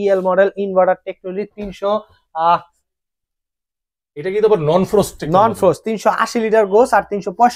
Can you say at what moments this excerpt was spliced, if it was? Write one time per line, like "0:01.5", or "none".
none